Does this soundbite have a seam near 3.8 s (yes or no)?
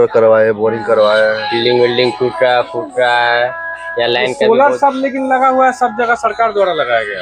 no